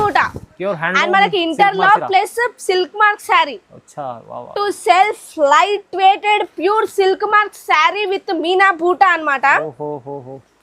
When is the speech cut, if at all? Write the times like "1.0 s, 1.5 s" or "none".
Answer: 4.5 s